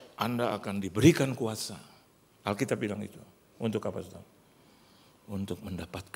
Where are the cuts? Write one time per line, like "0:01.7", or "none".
none